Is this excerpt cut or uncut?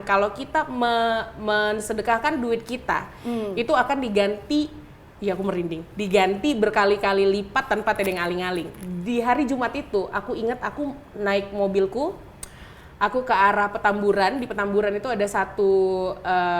uncut